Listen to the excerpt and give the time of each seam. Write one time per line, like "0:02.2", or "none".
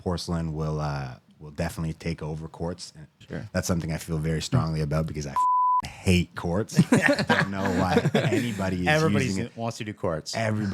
0:03.2